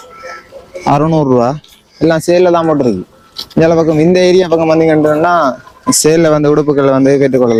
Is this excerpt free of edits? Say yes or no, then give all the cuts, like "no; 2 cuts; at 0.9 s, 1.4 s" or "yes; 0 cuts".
yes; 0 cuts